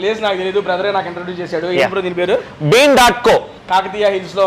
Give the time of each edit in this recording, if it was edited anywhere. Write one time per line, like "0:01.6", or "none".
0:03.6